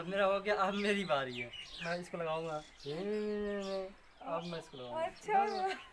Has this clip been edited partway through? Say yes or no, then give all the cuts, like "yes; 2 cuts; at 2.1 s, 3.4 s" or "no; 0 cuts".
yes; 1 cut; at 1.8 s